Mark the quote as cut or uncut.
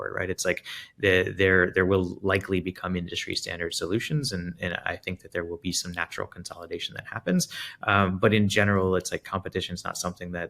uncut